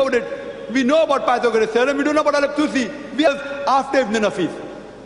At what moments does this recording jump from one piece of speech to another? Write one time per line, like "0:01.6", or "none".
none